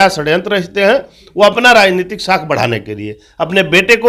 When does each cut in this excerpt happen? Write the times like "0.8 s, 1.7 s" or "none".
none